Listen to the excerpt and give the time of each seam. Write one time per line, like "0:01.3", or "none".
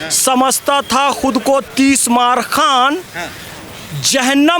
none